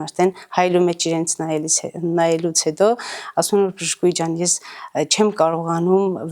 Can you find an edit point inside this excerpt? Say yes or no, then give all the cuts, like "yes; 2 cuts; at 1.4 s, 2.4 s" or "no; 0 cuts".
no; 0 cuts